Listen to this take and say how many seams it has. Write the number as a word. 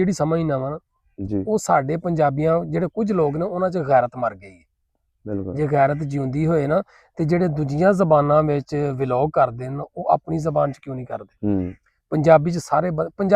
zero